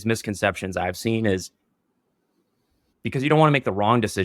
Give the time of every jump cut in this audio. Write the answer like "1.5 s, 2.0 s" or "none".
2.8 s